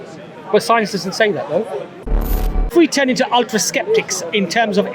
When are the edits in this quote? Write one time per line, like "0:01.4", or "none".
0:02.3